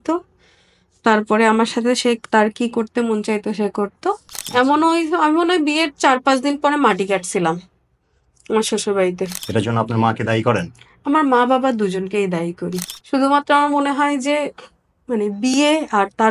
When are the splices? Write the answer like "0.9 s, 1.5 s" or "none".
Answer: 4.3 s, 9.3 s, 12.9 s